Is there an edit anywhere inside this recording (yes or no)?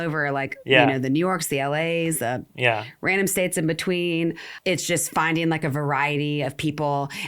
yes